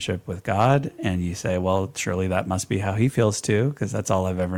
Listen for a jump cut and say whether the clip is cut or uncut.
uncut